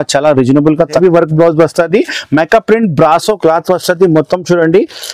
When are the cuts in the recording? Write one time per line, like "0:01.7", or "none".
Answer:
0:01.0